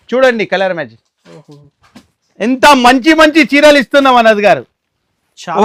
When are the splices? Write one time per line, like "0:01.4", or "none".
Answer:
none

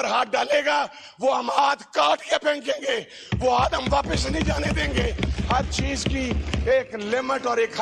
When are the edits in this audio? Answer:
none

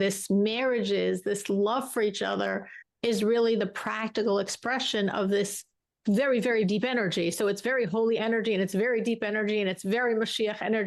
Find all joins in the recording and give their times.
none

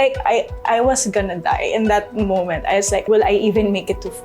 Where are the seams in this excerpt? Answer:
0:03.0

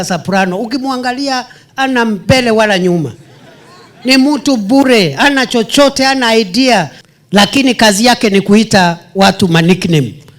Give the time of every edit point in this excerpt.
0:07.0

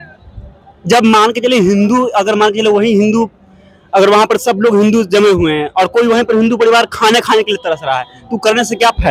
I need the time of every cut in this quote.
none

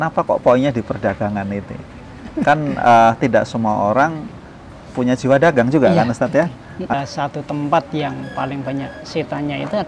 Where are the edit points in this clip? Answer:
0:06.9

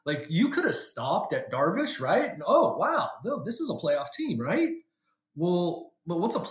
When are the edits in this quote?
none

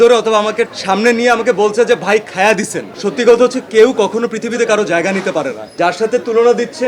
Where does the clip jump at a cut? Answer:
0:02.8
0:05.8

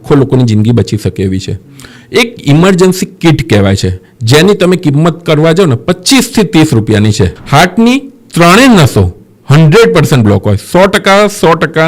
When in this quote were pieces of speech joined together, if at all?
0:07.4

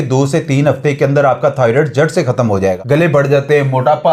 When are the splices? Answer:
0:02.8

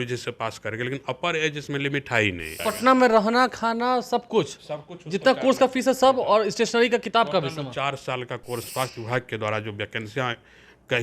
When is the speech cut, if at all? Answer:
0:02.6
0:08.7

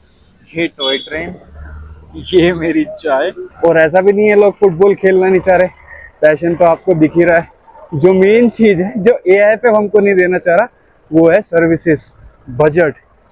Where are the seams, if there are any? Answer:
0:03.4

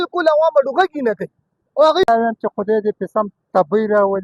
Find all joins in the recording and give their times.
0:02.0

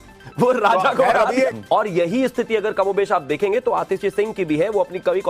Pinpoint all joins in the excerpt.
0:01.5

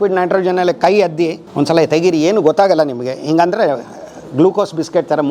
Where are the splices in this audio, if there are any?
0:01.4

